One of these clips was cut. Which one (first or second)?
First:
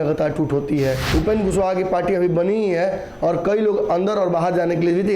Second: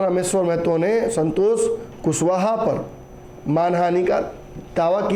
first